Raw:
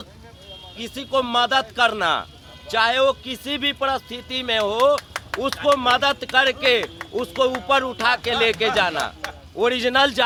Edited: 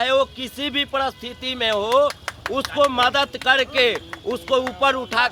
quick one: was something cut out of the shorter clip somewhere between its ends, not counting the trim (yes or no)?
no